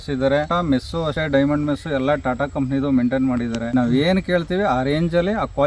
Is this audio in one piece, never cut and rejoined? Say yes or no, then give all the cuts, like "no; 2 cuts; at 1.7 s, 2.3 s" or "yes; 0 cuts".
no; 2 cuts; at 1.0 s, 3.6 s